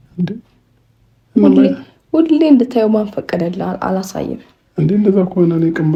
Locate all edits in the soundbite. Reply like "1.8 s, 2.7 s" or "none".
none